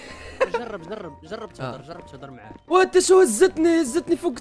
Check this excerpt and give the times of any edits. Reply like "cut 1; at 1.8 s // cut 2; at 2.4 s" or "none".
cut 1; at 2.5 s